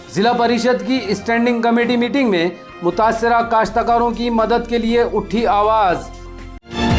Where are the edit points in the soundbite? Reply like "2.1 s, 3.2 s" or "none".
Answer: none